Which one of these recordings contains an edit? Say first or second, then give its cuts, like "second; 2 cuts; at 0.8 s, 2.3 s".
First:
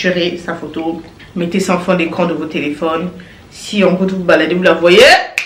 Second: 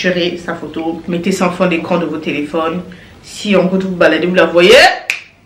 second; 1 cut; at 1.0 s